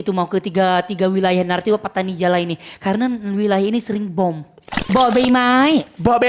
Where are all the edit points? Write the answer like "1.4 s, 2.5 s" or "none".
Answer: 4.9 s